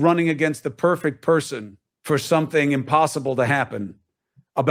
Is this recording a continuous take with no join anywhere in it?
no; 1 cut; at 2.9 s

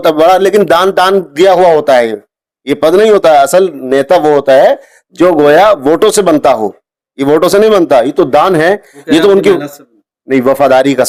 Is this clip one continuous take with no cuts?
yes; 0 cuts

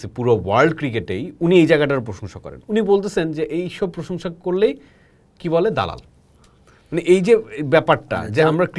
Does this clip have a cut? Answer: no; 0 cuts

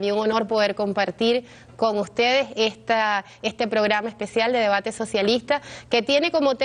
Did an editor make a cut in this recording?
no; 0 cuts

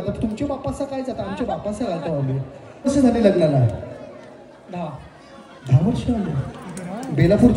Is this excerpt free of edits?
no; 1 cut; at 2.9 s

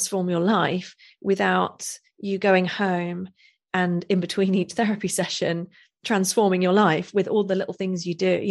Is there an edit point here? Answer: no; 0 cuts

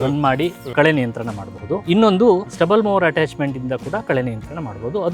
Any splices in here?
yes; 2 cuts; at 1.8 s, 2.5 s

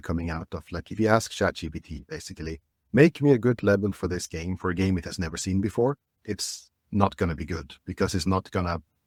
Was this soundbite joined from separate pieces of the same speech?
no; 0 cuts

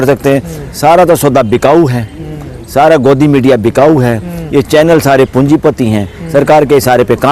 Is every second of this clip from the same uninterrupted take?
yes; 0 cuts

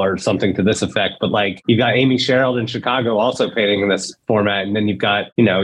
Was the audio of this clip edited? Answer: no; 0 cuts

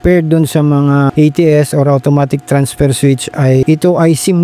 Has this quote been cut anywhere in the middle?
yes; 2 cuts; at 1.1 s, 3.6 s

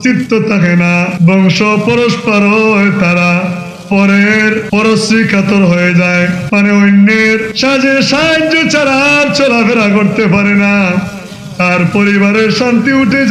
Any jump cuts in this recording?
yes; 4 cuts; at 1.1 s, 4.6 s, 6.4 s, 7.5 s

